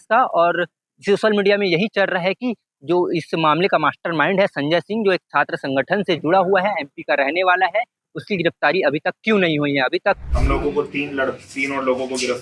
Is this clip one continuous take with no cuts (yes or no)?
no